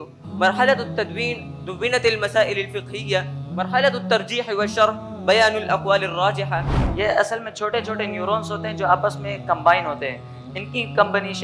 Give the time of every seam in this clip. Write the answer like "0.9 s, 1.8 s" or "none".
6.8 s